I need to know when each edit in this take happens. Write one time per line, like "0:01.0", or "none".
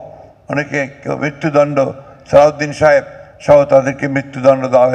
none